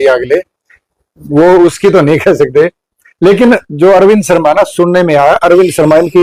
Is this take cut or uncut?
uncut